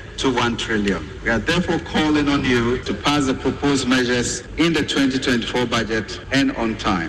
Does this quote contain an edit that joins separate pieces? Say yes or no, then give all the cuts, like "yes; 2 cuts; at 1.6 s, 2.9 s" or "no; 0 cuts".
yes; 4 cuts; at 1.1 s, 2.8 s, 4.4 s, 6.2 s